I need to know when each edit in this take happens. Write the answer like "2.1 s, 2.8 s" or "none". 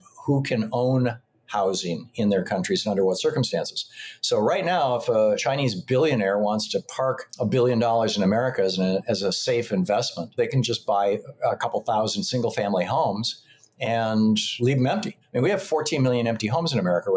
5.4 s, 7.3 s, 15.2 s

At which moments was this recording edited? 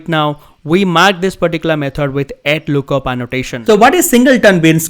3.6 s

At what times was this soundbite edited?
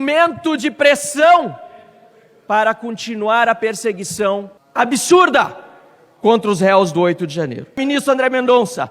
4.6 s, 7.8 s

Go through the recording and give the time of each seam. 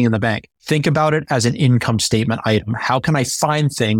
none

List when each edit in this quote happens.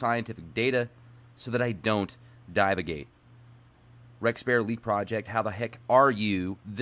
1.1 s

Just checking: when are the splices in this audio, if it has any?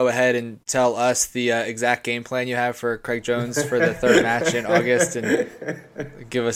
none

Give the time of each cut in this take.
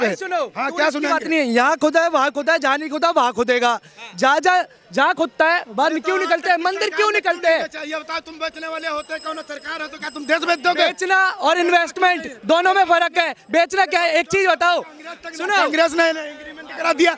none

